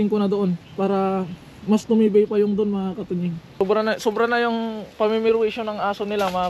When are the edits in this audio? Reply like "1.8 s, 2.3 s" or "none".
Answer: 3.5 s